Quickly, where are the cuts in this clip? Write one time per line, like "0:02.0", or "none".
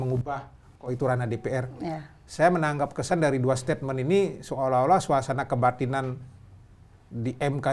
none

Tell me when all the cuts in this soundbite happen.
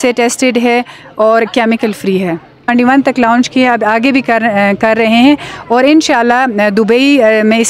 0:02.7

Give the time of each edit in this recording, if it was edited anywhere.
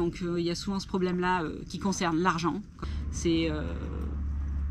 0:02.8

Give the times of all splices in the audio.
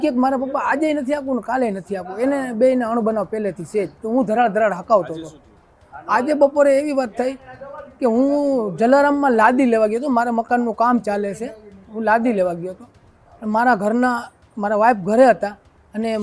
none

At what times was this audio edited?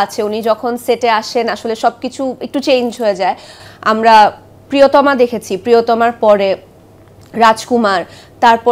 0:03.5

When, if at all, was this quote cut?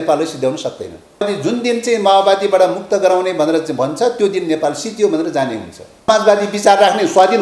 0:01.3
0:06.1

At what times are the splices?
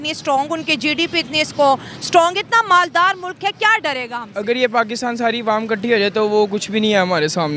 none

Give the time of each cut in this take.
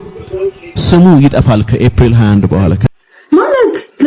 0:02.8

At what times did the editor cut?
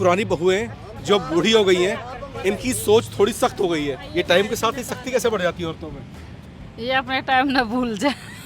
0:04.0

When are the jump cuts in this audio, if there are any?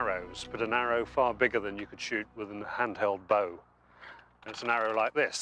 0:01.4

